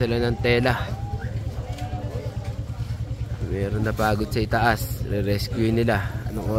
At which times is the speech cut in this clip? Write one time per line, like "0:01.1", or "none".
none